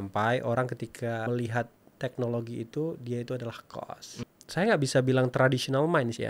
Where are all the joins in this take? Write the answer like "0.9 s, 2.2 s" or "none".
1.3 s, 4.2 s

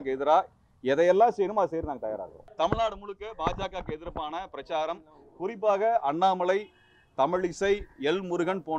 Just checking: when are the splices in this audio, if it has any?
2.4 s

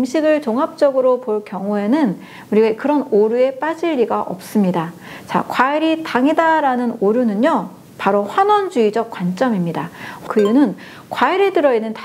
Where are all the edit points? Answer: 10.2 s

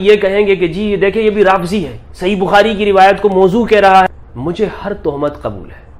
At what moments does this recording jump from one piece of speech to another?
4.1 s

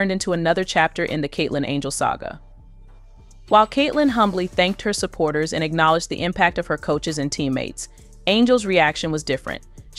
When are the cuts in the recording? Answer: none

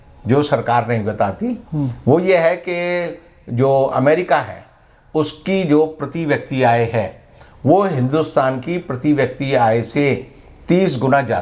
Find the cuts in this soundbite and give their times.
none

